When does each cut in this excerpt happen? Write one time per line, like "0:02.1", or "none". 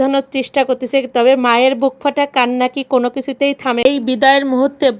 0:03.9